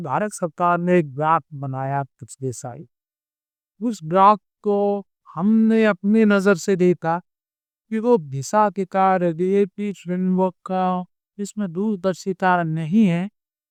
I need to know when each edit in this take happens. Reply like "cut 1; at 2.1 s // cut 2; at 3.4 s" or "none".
none